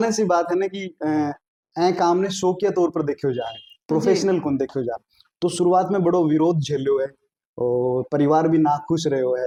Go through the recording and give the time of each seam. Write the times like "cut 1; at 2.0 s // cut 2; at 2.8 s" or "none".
none